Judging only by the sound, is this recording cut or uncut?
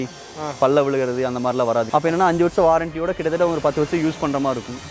cut